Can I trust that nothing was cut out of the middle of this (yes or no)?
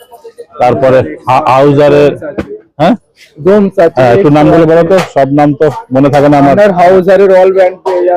yes